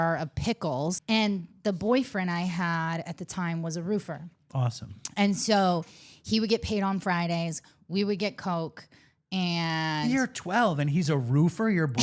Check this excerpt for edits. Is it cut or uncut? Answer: cut